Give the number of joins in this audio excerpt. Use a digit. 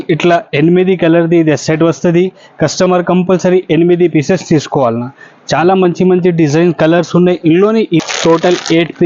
1